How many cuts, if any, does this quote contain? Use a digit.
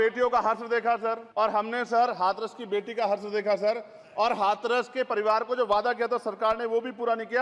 1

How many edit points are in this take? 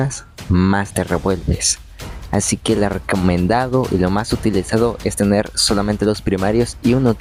0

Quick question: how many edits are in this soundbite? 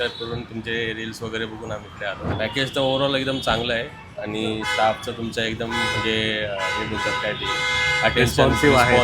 1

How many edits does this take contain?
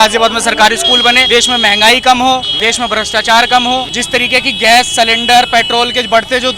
3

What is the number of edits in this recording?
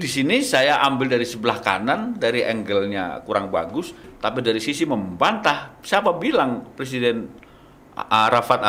0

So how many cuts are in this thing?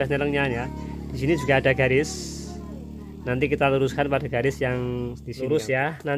1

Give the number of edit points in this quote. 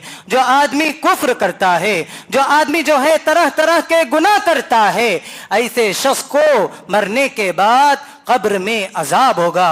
0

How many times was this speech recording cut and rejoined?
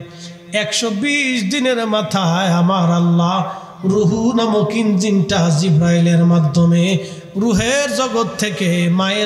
0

